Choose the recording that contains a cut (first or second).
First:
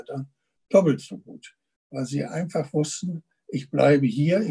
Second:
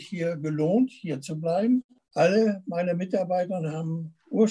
second